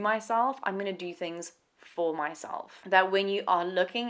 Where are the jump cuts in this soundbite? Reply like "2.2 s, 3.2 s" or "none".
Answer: 2.7 s